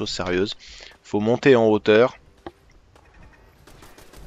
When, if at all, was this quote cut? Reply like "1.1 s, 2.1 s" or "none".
1.2 s